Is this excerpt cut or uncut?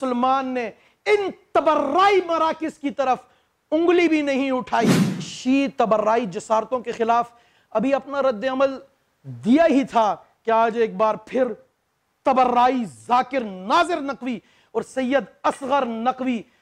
cut